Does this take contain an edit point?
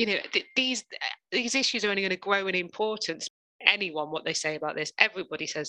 yes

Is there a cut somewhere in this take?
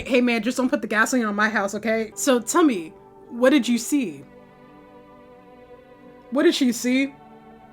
yes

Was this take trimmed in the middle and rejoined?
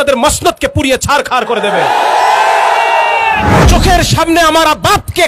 yes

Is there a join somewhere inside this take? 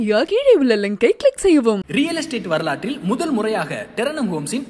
no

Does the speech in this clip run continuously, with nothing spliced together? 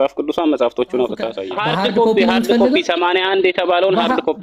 no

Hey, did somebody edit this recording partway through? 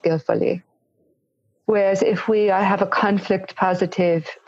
no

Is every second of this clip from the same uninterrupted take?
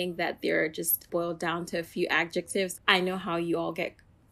no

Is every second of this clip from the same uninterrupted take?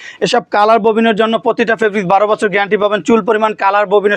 yes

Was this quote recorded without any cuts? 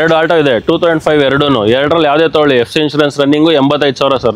yes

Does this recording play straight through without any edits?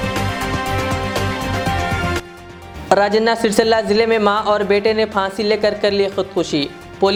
yes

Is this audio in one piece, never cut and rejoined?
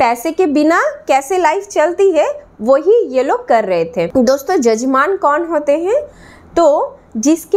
yes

